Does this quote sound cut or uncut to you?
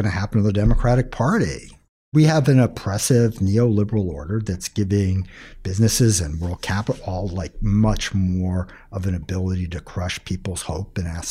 cut